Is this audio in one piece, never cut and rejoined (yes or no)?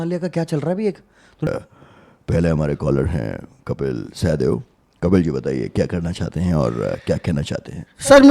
no